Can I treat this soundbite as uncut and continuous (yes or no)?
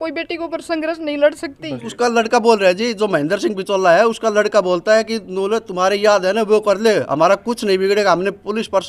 no